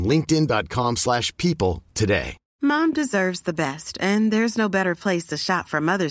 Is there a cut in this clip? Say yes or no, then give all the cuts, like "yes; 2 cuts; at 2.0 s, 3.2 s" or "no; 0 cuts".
yes; 1 cut; at 2.4 s